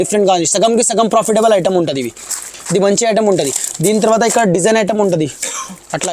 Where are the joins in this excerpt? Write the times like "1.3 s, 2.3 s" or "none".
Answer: none